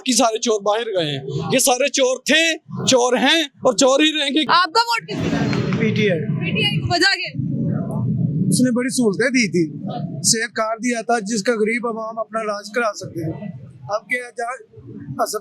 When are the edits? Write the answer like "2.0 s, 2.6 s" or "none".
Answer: 4.5 s